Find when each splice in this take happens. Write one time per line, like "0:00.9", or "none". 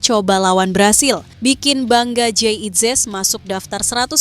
0:01.3